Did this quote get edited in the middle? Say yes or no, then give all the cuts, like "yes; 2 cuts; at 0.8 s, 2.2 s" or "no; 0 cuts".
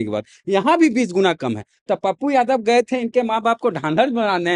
no; 0 cuts